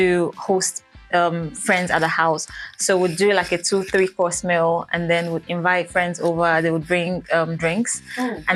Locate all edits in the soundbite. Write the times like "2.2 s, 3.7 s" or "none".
none